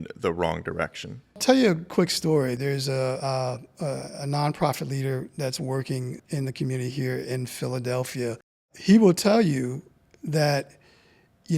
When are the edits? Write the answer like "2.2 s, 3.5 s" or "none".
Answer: 1.4 s, 2.6 s, 6.2 s, 8.7 s